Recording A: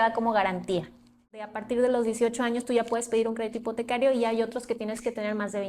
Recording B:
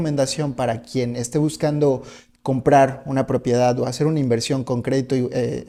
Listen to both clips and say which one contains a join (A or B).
A